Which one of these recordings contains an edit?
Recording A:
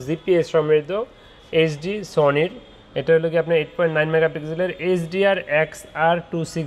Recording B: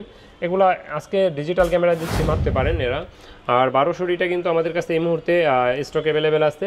B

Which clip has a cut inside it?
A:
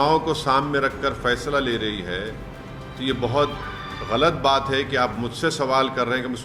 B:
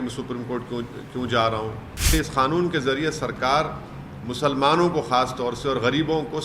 B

